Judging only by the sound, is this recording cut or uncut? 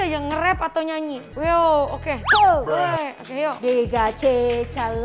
cut